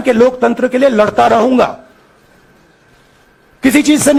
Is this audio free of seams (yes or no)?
yes